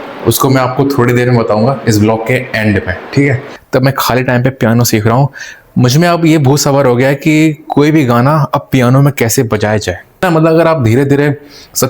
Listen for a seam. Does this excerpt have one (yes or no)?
yes